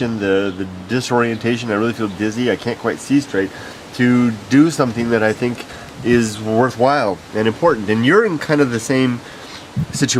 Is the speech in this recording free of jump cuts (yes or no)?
yes